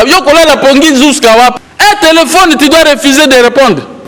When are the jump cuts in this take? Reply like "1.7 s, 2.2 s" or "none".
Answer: 1.6 s